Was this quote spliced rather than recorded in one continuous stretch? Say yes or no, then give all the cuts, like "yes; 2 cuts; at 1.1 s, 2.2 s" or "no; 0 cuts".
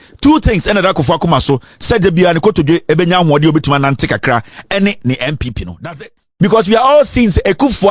yes; 1 cut; at 6.2 s